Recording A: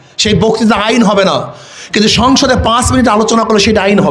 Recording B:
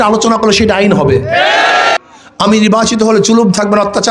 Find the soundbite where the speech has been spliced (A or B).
B